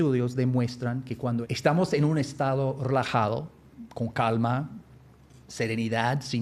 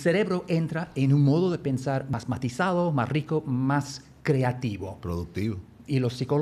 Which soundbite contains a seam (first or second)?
first